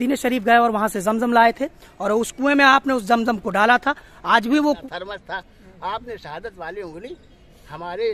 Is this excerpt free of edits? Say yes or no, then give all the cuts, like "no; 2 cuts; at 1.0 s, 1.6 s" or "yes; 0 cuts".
no; 1 cut; at 4.8 s